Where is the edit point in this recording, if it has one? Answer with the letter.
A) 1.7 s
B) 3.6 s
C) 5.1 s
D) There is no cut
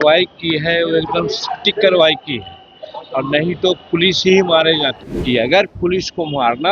C